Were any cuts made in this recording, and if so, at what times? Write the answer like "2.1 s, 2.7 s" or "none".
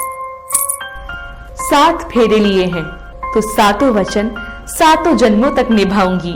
1.7 s